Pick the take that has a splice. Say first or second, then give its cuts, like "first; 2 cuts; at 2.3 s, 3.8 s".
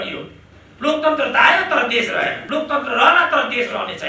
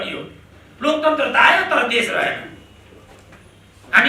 first; 1 cut; at 2.4 s